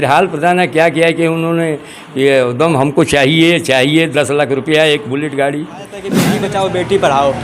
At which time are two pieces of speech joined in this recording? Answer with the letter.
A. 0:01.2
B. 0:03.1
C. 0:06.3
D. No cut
C